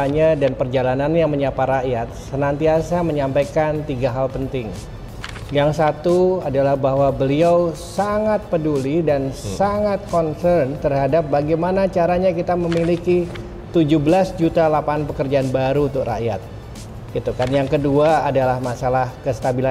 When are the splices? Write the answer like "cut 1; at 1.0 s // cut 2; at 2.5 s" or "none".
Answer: none